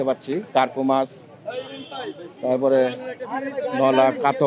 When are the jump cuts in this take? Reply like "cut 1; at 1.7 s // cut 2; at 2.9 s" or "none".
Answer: none